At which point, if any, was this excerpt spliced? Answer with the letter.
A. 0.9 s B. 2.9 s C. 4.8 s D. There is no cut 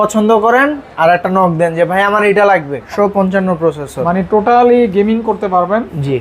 B